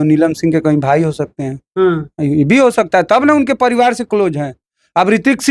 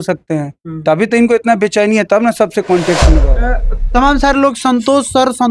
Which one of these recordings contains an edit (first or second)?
second